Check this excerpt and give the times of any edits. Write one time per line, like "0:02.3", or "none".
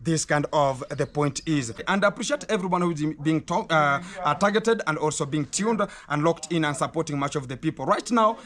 0:01.8